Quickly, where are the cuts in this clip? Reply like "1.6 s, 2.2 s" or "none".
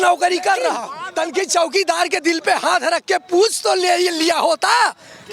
0.9 s